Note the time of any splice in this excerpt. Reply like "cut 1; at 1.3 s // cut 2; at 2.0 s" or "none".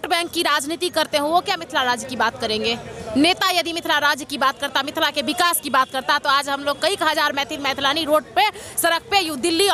none